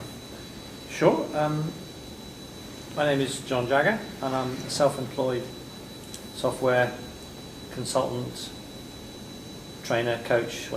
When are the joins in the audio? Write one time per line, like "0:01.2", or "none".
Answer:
0:01.4